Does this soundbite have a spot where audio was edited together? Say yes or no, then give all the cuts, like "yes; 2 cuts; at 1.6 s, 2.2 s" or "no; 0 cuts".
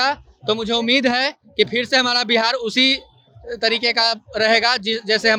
no; 0 cuts